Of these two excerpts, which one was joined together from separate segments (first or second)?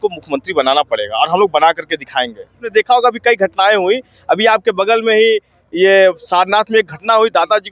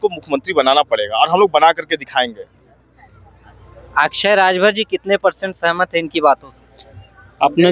first